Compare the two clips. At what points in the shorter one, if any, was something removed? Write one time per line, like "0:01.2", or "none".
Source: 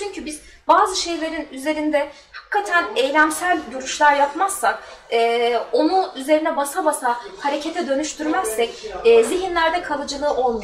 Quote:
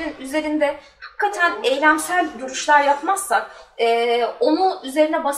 none